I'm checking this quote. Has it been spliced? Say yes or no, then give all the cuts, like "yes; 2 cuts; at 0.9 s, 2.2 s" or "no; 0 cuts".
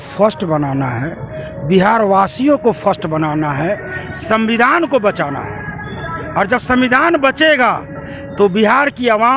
no; 0 cuts